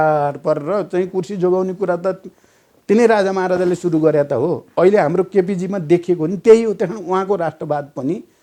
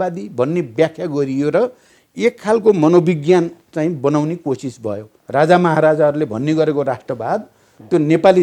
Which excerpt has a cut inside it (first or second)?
second